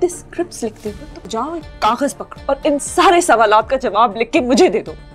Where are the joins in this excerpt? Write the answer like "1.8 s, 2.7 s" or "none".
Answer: 1.1 s, 2.3 s